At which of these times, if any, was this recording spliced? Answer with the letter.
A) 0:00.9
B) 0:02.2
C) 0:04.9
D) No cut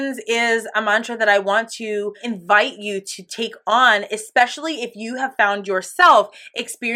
B